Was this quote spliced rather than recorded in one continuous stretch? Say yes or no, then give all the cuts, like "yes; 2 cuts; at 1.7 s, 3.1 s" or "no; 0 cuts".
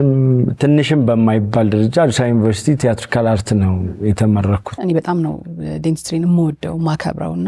yes; 1 cut; at 4.8 s